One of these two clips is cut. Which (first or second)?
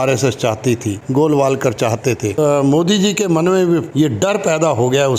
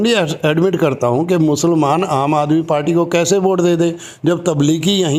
first